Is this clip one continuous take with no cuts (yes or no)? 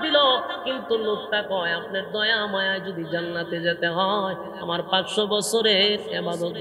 yes